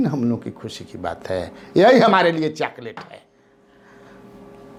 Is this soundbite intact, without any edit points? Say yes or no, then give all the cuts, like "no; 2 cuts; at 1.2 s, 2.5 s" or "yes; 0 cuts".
yes; 0 cuts